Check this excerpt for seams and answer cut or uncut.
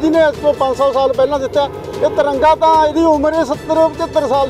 uncut